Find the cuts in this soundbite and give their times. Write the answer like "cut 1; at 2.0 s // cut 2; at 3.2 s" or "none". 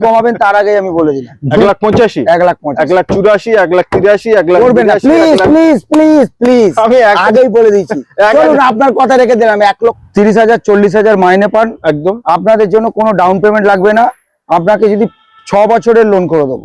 cut 1; at 1.6 s // cut 2; at 10.0 s